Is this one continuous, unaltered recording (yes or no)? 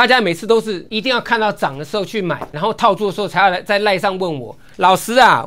no